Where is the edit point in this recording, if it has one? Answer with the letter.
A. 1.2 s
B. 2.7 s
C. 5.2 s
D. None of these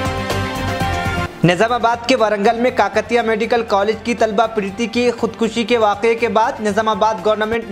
A